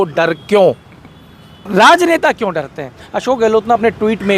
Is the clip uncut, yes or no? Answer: no